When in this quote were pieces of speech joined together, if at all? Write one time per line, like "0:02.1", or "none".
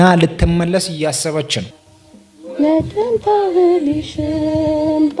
none